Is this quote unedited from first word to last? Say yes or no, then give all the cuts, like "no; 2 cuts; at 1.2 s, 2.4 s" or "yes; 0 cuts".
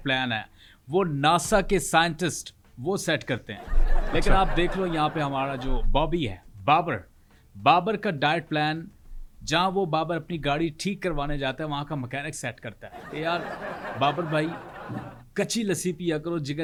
yes; 0 cuts